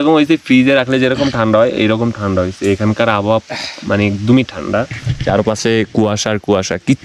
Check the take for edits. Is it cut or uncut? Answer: uncut